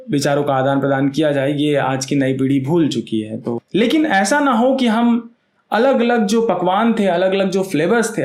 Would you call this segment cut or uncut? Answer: cut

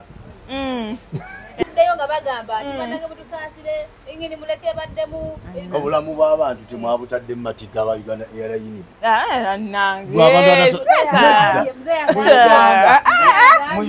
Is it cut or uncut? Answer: cut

